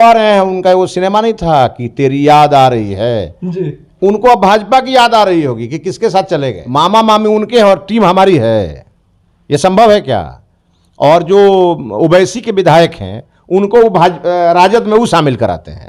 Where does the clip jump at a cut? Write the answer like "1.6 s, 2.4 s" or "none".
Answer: 6.6 s